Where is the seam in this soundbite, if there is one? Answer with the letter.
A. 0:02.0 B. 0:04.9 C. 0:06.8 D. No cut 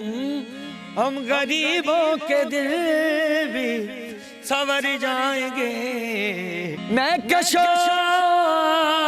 C